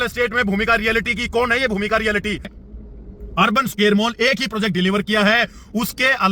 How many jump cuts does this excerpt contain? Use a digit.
1